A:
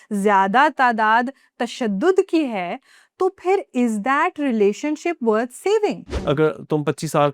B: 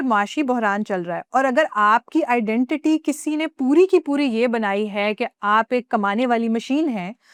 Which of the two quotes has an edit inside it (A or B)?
A